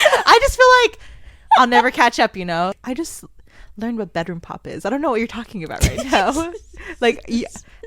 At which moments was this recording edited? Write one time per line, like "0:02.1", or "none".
0:02.8

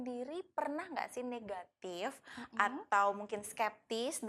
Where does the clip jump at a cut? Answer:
none

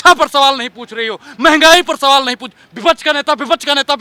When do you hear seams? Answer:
none

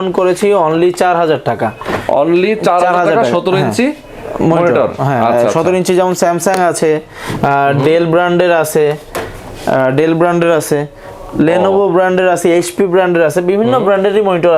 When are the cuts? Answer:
none

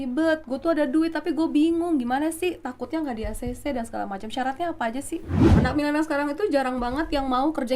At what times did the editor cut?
0:05.6

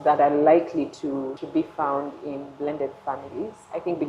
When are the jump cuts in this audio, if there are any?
0:01.4

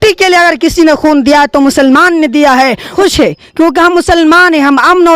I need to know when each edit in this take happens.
0:02.9

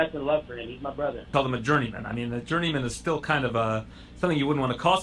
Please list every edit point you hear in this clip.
0:01.3

